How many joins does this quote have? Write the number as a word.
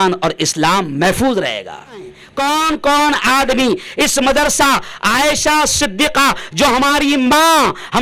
one